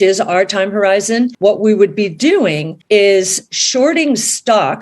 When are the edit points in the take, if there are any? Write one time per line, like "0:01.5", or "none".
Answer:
0:01.3
0:02.7